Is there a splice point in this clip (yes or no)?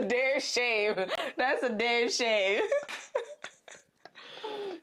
no